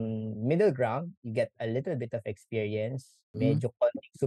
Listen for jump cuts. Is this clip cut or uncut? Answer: cut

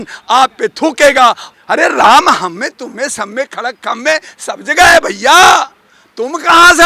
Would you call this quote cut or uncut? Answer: cut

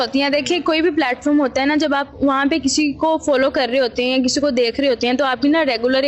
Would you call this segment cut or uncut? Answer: uncut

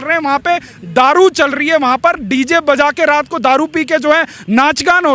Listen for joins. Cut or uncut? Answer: uncut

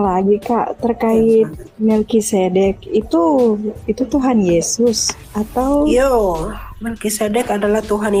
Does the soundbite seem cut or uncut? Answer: uncut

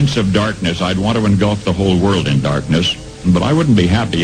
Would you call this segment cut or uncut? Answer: cut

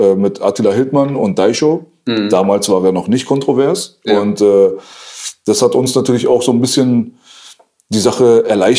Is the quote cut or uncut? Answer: uncut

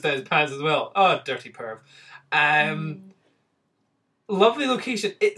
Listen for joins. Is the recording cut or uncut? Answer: uncut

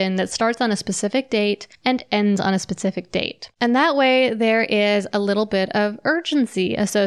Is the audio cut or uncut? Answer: cut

